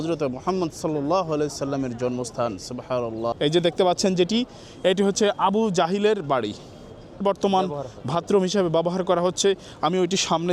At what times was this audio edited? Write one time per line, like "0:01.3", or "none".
0:03.3
0:07.2